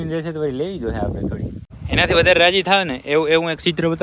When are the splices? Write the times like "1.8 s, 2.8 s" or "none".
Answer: 1.7 s